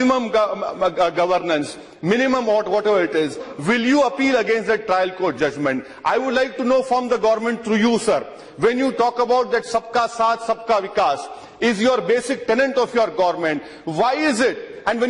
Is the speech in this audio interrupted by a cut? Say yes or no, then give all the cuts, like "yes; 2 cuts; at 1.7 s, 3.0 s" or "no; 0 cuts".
yes; 1 cut; at 10.9 s